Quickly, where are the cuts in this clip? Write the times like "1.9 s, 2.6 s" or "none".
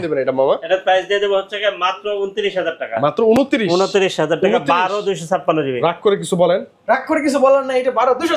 none